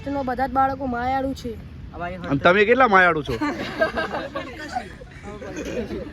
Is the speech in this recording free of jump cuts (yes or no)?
yes